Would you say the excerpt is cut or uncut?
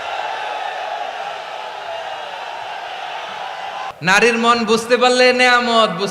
cut